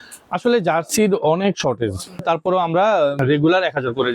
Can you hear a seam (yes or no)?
yes